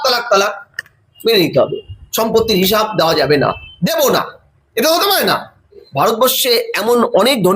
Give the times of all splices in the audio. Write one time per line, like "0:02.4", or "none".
0:05.8